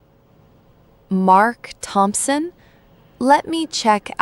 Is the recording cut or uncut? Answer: cut